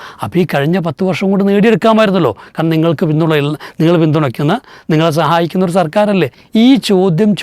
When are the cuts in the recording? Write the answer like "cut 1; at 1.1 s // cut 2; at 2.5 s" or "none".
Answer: cut 1; at 6.4 s